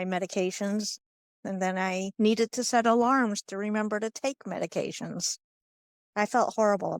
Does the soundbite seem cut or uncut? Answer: uncut